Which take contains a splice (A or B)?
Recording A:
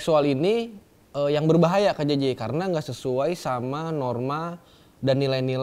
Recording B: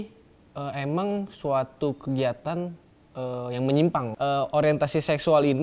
B